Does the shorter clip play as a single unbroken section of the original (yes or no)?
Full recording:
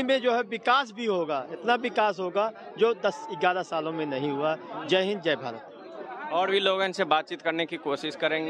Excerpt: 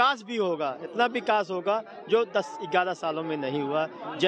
yes